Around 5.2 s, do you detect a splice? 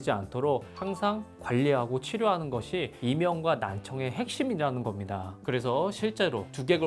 yes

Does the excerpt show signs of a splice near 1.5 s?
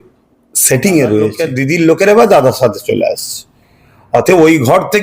yes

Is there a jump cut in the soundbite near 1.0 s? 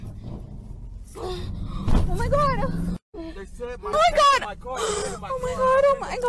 no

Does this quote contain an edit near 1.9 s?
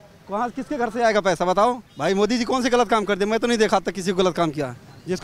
yes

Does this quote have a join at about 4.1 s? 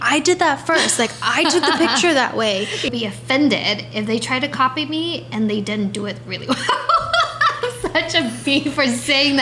no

